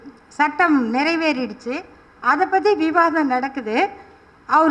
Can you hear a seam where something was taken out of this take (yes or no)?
no